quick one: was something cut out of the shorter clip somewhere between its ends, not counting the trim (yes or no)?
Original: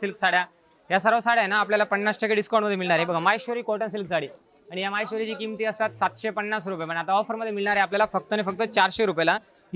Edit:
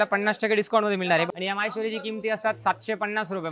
yes